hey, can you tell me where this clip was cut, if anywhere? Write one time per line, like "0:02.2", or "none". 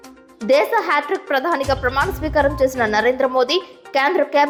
none